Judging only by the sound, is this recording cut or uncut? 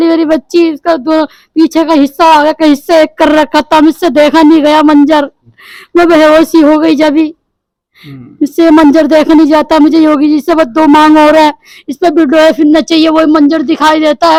uncut